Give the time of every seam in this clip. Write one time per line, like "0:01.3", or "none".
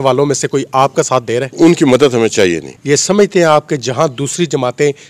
0:01.5
0:02.7